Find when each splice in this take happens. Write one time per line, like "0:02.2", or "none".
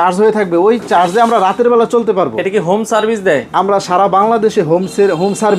none